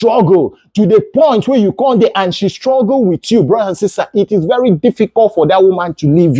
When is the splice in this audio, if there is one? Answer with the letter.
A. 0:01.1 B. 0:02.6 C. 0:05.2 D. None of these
D